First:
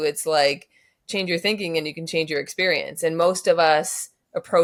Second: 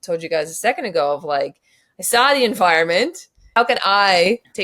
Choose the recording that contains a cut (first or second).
second